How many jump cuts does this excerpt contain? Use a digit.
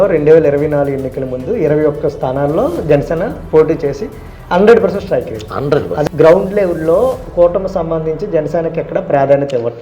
1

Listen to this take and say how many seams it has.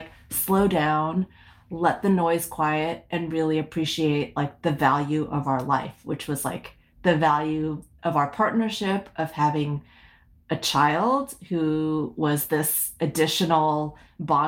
0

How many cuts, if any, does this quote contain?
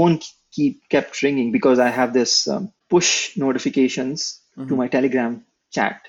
1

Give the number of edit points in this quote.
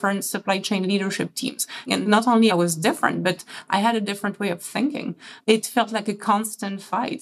2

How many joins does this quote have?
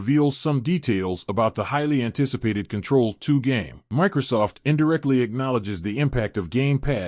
1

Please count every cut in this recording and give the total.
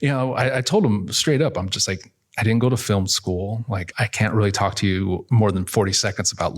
2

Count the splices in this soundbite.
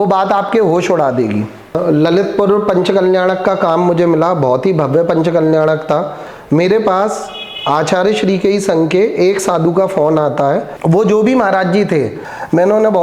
4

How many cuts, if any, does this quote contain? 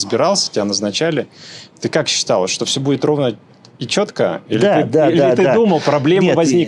0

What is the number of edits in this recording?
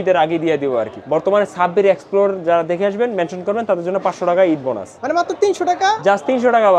2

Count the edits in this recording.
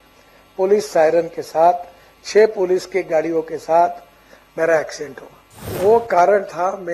1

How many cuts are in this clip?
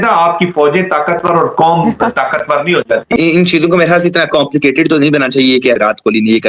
2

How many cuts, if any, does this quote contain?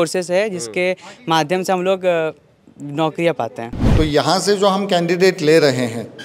1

